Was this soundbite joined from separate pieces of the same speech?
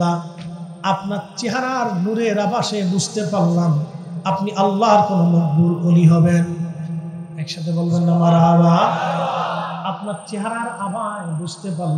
no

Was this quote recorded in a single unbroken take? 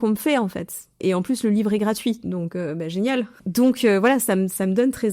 no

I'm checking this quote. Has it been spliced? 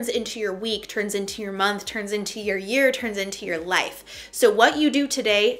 no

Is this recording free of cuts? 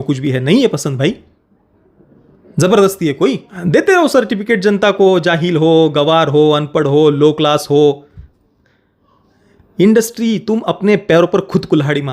no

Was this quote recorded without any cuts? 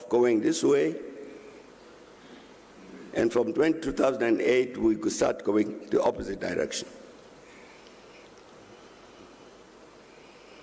yes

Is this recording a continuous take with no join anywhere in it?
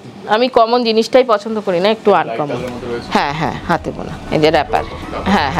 no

